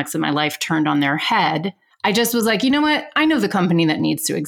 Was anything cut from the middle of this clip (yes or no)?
yes